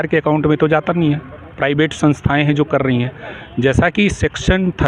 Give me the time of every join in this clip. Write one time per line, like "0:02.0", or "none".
none